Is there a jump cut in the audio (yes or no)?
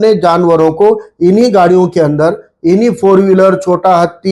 no